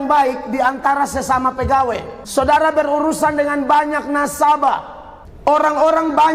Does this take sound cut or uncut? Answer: cut